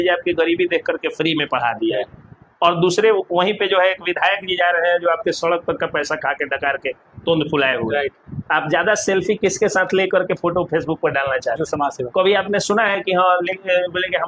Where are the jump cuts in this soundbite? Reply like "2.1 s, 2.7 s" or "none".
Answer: none